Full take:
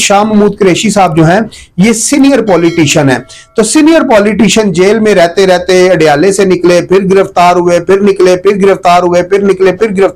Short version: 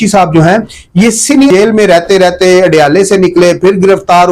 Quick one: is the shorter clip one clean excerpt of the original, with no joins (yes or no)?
no